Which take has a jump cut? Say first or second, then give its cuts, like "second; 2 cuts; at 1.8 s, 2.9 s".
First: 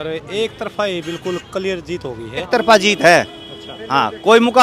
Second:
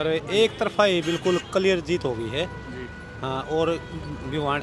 first; 1 cut; at 2.5 s